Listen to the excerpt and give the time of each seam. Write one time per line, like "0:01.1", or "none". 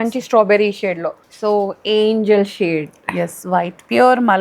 0:01.1

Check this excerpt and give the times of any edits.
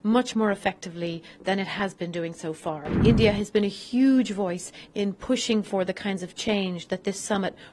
0:02.9

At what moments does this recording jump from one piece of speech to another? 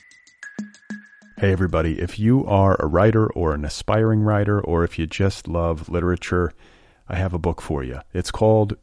0:00.9

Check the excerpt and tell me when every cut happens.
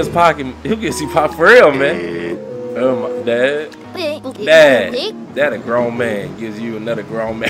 none

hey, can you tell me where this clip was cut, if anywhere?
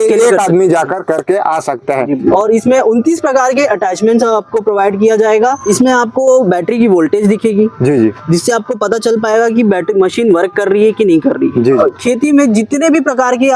0:02.3
0:05.6
0:11.7

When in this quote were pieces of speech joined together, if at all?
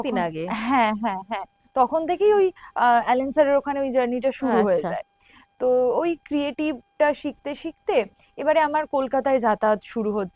none

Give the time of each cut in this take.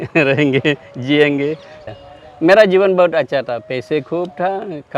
0:01.8

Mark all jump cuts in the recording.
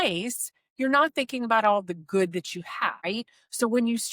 0:03.0

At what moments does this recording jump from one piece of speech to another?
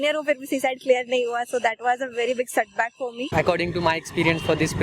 0:03.3

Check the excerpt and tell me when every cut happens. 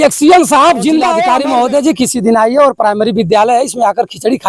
0:01.2

